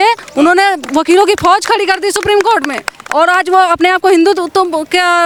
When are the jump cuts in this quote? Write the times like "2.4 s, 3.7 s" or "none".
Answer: none

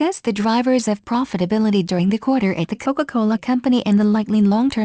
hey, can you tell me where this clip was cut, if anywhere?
none

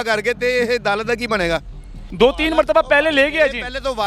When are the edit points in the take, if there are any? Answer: 2.0 s

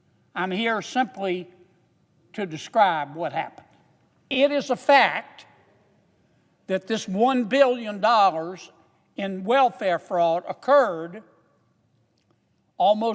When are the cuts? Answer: 4.3 s

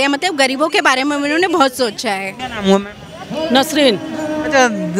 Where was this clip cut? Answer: 2.4 s

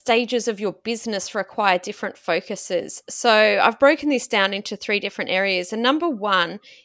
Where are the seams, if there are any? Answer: none

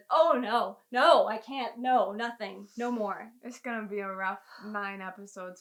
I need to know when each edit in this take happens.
none

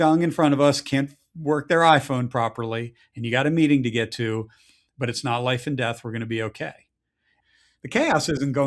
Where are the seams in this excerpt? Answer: 7.3 s

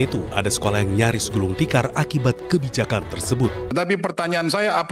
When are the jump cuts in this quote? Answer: 3.7 s

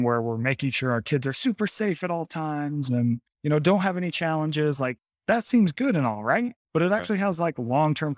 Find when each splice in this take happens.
3.3 s, 5.1 s, 6.6 s

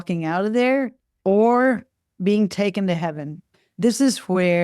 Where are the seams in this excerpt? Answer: 1.0 s, 3.5 s

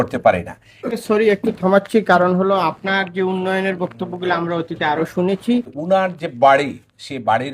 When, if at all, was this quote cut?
1.0 s, 5.7 s

